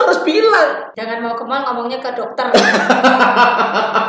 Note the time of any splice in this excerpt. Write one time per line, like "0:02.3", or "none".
0:00.9